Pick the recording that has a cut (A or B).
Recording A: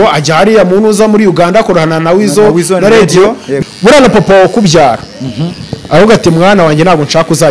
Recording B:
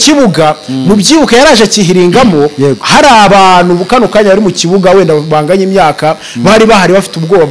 A